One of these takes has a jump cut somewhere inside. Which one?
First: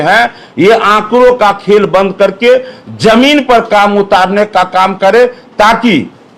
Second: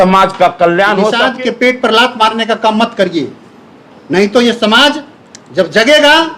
second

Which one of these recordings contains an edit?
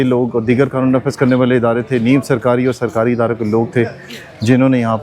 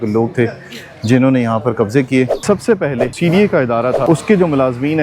second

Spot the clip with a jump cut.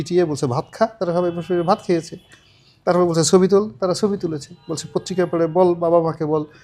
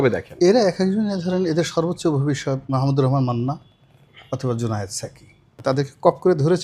second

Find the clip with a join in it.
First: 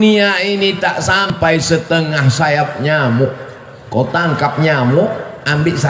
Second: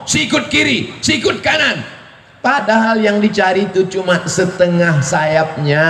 first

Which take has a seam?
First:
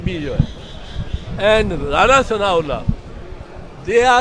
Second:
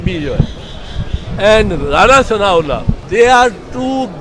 second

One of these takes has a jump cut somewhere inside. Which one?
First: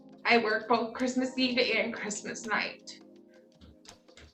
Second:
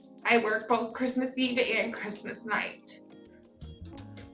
first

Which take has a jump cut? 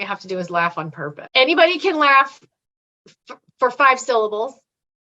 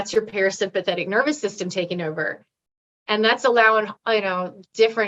first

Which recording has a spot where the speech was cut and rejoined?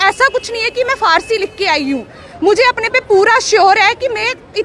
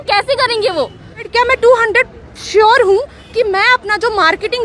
second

